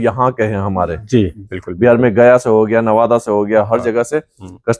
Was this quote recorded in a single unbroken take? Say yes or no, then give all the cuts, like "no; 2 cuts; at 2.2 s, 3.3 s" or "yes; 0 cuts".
no; 1 cut; at 1.4 s